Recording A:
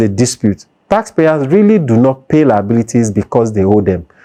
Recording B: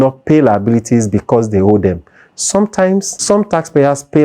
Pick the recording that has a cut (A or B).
B